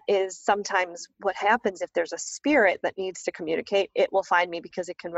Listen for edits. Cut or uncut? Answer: uncut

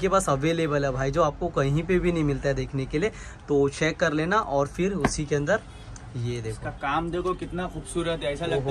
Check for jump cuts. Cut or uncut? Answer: uncut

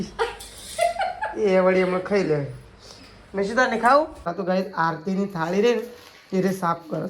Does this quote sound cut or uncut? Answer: cut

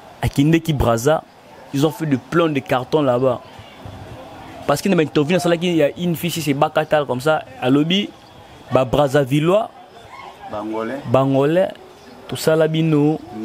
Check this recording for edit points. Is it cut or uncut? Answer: uncut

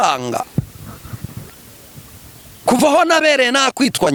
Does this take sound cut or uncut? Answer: uncut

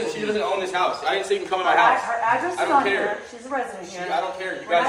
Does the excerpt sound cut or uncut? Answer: uncut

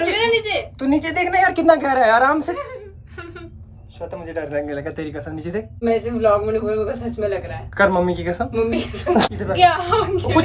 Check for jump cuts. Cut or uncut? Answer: cut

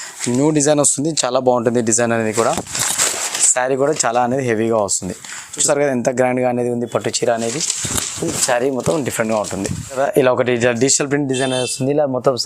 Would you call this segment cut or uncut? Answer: cut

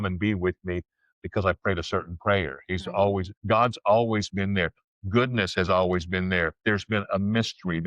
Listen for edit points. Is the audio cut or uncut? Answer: cut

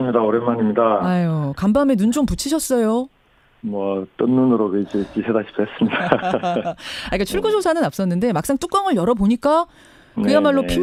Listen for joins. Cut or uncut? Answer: uncut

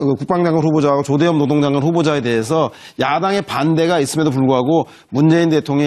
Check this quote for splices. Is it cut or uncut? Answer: cut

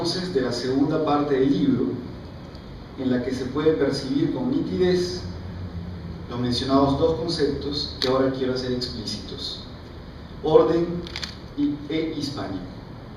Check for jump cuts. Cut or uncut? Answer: cut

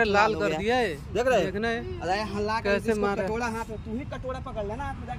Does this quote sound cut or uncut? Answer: uncut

